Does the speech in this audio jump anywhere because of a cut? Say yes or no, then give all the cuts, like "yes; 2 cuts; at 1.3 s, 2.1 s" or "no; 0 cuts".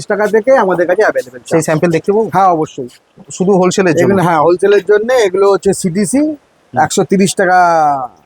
no; 0 cuts